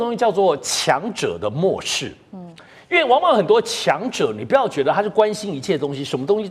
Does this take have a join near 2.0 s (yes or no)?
no